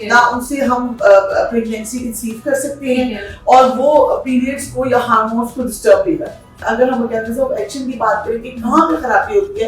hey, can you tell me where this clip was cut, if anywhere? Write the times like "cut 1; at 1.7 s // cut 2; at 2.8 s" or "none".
cut 1; at 6.6 s